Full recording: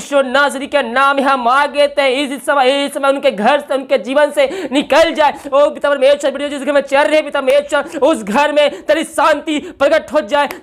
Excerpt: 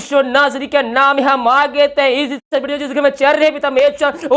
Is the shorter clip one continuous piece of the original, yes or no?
no